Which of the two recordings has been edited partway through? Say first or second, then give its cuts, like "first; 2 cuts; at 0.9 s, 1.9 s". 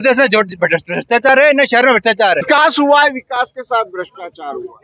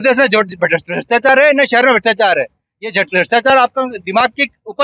first; 1 cut; at 2.4 s